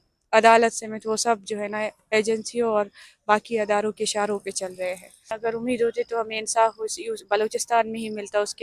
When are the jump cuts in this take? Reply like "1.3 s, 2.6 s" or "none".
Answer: 5.3 s